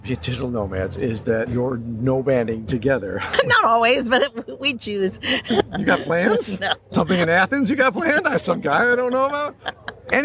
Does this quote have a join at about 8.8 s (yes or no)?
no